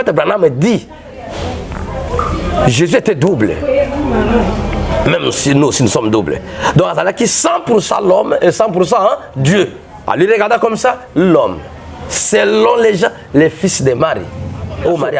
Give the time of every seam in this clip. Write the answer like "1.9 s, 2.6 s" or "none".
none